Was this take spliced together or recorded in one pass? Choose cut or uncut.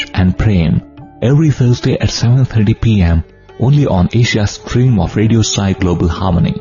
uncut